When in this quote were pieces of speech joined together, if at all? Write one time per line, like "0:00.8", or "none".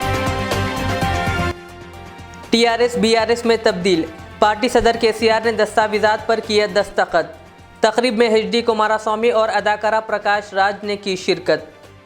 0:01.5